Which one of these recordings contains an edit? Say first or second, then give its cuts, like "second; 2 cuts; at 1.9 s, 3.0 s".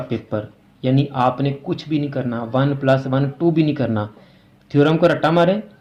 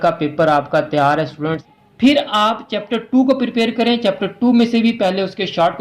second; 1 cut; at 1.6 s